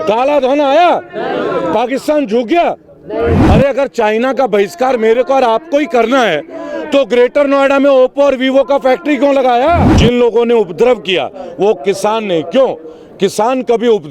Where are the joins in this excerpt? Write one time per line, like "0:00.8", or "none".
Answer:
0:03.4
0:09.9